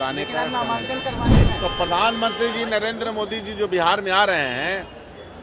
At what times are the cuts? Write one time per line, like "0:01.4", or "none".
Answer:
0:01.3